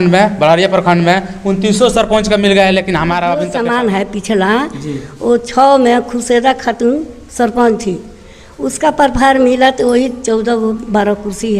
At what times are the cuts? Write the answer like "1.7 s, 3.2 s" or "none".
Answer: 3.5 s